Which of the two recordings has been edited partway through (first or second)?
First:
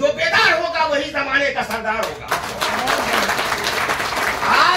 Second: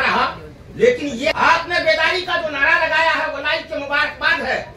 second